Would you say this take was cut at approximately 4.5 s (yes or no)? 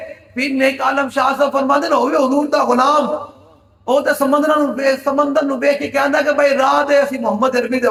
no